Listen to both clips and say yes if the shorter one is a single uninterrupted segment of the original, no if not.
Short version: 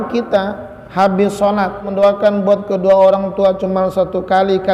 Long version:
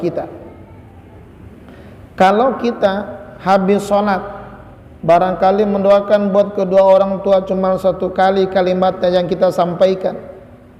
no